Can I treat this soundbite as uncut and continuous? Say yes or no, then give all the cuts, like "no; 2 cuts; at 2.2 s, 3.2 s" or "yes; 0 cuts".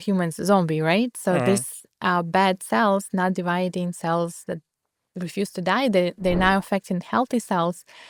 yes; 0 cuts